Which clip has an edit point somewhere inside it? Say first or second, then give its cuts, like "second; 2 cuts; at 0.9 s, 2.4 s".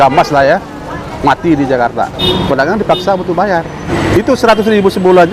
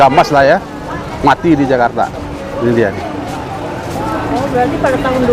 first; 2 cuts; at 2.2 s, 3.9 s